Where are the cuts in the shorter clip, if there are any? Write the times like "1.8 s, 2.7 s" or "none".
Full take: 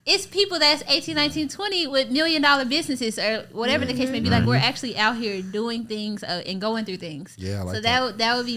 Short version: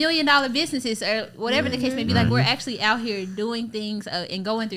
none